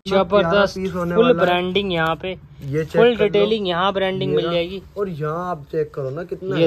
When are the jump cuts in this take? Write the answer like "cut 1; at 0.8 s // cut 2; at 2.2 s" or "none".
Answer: none